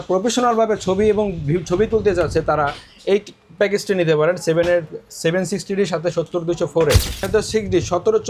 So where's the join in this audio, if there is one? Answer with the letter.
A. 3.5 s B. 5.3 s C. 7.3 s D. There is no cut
C